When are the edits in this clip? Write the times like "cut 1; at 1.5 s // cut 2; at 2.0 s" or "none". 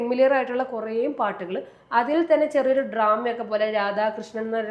none